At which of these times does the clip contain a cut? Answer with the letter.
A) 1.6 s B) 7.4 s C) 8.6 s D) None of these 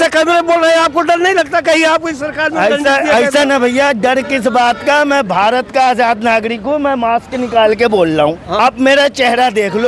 C